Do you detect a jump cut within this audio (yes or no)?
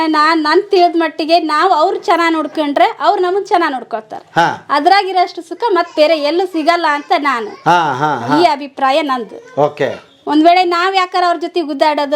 no